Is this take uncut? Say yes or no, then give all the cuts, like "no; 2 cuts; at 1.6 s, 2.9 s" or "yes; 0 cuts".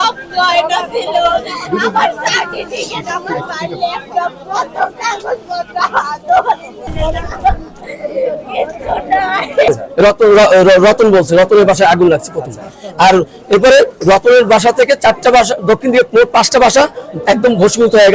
no; 2 cuts; at 6.8 s, 9.7 s